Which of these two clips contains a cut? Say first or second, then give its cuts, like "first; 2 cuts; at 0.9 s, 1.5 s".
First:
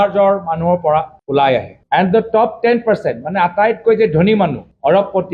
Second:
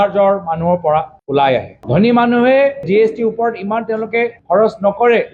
first; 1 cut; at 1.7 s